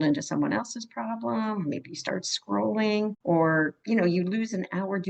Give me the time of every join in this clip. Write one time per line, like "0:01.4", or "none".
0:03.2
0:03.8